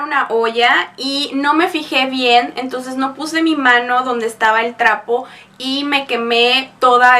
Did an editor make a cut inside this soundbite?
no; 0 cuts

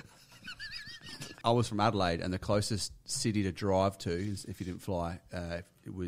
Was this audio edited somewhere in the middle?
yes; 1 cut; at 1.4 s

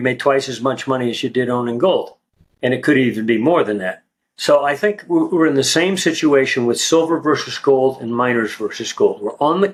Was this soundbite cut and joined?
no; 0 cuts

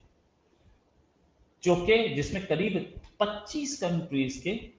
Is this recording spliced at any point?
no; 0 cuts

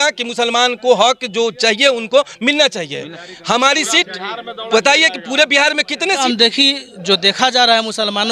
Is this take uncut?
no; 1 cut; at 6.2 s

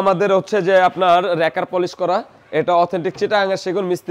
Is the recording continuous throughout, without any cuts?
yes; 0 cuts

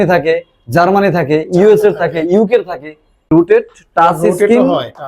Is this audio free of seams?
no; 1 cut; at 3.3 s

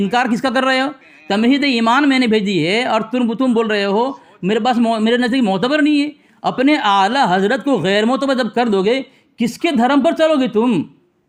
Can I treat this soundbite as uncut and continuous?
yes; 0 cuts

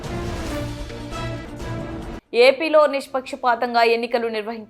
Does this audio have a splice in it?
yes; 1 cut; at 2.1 s

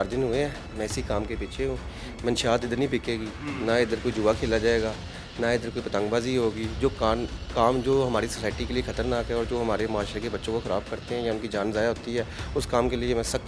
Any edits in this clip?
no; 0 cuts

